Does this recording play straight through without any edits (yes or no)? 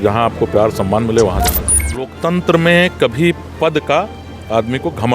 no